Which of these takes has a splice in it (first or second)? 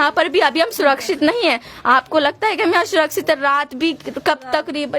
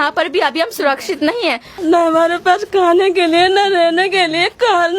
second